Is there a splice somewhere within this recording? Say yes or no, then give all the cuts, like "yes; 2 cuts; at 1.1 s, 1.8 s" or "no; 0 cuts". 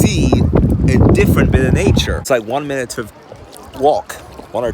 yes; 1 cut; at 2.1 s